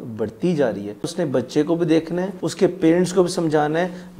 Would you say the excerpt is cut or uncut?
cut